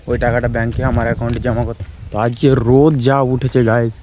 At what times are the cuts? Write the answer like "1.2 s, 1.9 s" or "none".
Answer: 1.8 s

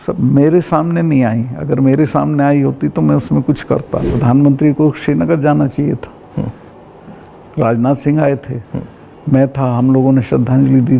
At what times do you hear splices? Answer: 4.0 s

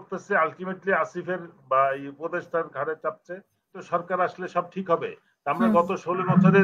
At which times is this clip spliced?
3.7 s

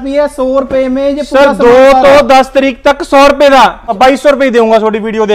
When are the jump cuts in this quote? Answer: 3.8 s

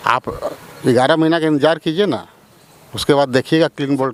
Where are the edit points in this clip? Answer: none

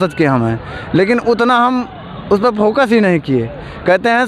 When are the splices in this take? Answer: none

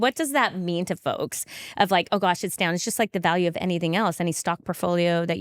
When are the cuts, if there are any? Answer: none

